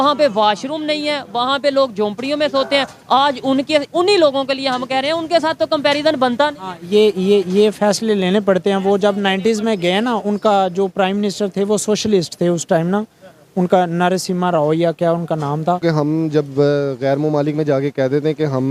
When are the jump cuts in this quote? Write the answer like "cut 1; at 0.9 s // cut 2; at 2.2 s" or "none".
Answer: cut 1; at 15.8 s

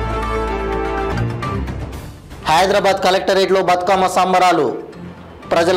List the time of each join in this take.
cut 1; at 1.1 s

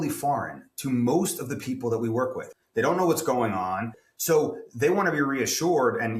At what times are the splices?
cut 1; at 2.4 s // cut 2; at 4.0 s

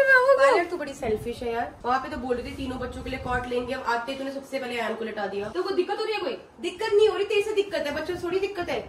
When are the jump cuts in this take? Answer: cut 1; at 1.7 s // cut 2; at 5.5 s

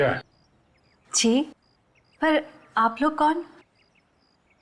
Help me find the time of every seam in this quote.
none

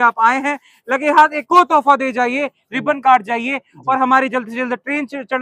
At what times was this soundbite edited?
none

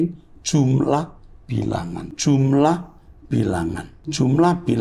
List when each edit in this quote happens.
cut 1; at 2.1 s // cut 2; at 3.9 s

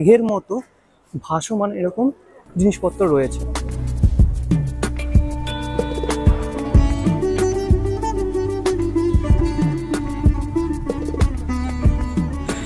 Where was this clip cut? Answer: none

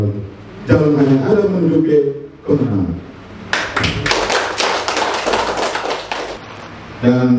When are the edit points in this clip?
cut 1; at 6.3 s

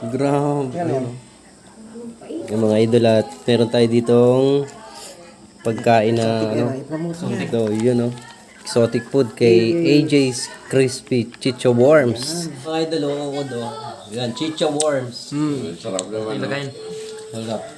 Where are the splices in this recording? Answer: cut 1; at 2.5 s // cut 2; at 12.5 s

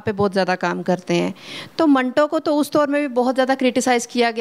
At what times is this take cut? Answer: none

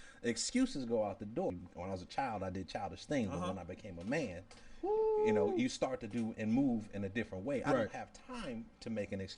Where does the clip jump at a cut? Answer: cut 1; at 1.5 s

